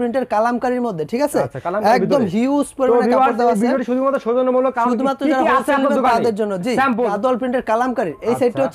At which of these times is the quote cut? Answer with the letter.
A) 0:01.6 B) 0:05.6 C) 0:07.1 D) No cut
C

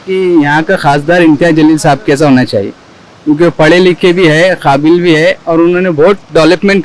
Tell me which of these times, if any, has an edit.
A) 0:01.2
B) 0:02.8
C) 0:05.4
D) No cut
D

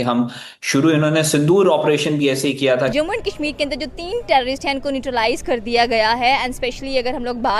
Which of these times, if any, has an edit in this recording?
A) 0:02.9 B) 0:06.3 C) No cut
A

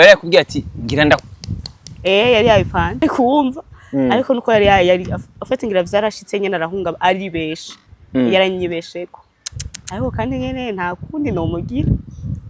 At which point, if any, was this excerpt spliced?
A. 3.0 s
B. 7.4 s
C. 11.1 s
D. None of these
A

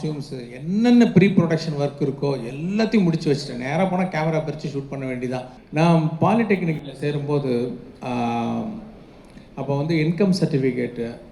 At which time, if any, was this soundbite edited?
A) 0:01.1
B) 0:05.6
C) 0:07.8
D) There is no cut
B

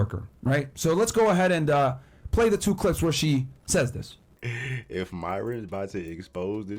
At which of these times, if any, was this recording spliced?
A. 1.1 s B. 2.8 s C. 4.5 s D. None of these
C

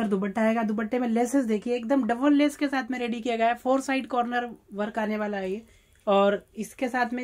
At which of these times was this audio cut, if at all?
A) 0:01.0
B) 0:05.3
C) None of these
C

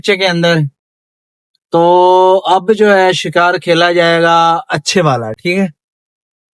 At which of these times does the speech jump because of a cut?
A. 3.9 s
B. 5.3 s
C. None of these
C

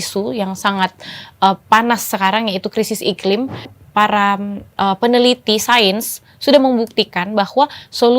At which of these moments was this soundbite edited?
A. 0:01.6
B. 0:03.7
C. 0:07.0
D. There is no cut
B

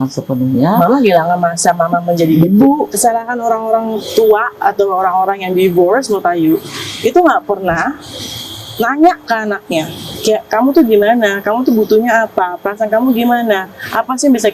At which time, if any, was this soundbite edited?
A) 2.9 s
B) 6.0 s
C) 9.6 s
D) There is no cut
A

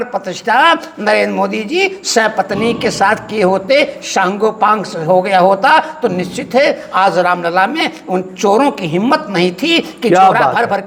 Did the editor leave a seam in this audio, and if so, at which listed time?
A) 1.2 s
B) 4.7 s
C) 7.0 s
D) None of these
D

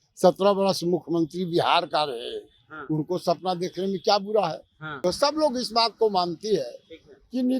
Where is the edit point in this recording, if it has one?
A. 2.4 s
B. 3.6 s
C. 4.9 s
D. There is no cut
C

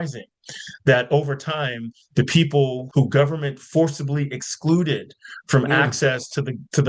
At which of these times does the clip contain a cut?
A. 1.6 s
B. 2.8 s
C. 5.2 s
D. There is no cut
B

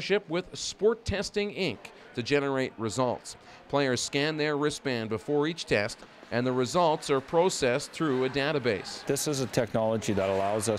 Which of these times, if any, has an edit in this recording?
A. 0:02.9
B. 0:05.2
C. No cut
A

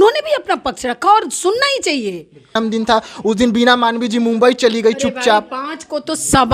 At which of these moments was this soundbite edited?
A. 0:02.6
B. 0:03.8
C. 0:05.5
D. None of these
A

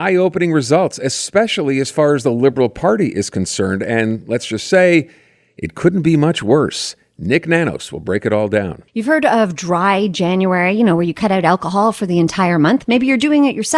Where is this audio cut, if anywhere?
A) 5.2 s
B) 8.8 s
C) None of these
B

